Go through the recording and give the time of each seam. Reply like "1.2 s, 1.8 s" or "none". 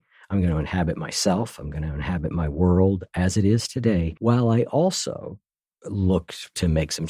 4.1 s